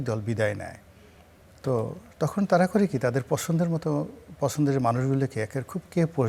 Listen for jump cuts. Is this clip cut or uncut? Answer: uncut